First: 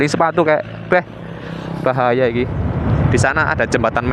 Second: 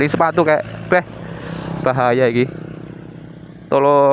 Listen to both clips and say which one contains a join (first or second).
first